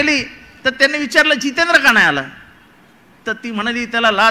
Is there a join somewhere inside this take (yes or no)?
no